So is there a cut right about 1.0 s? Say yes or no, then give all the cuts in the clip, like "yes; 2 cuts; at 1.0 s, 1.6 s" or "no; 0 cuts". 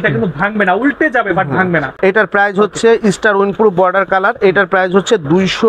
no; 0 cuts